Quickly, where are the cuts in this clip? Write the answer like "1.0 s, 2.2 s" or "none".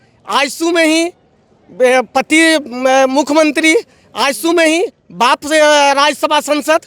none